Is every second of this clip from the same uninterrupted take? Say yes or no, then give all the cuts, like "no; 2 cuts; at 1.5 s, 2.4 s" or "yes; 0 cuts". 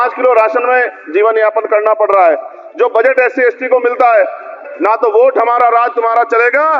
no; 1 cut; at 4.6 s